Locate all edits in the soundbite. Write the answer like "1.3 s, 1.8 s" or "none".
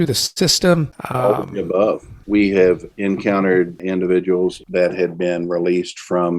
1.0 s, 2.1 s, 2.9 s, 3.8 s, 4.6 s